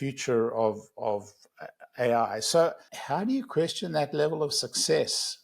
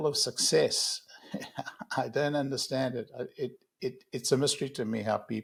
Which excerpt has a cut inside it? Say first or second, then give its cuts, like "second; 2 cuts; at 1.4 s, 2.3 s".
first; 1 cut; at 2.9 s